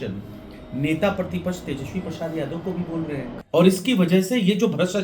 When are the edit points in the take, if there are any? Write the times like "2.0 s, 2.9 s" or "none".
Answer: 3.3 s